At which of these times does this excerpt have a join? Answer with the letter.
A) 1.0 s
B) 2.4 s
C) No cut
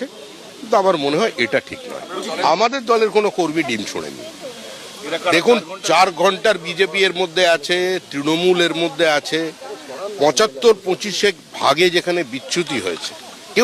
B